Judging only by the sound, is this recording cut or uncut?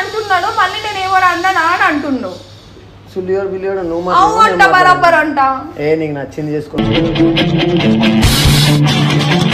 uncut